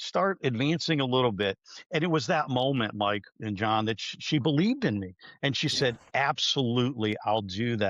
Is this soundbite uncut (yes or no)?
yes